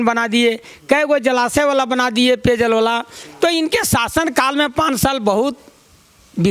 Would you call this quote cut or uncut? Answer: uncut